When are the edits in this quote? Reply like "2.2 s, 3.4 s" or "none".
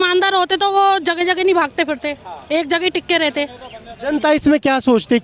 none